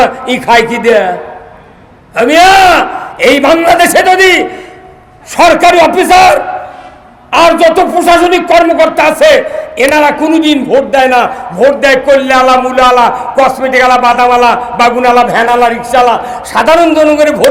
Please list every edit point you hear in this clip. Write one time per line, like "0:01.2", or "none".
none